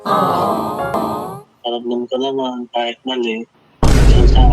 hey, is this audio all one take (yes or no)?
no